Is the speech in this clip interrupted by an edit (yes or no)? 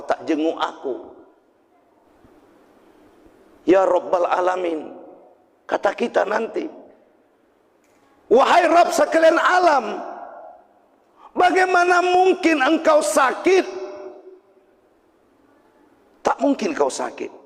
yes